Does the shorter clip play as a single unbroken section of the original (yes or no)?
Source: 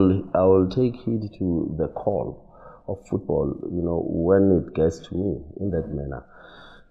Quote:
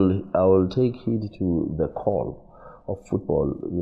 yes